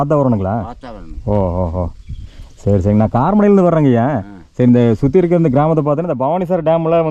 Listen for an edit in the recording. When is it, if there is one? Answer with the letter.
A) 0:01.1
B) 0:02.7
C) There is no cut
C